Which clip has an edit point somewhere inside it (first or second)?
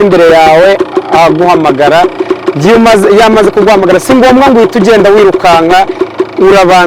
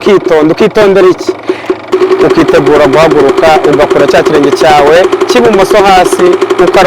second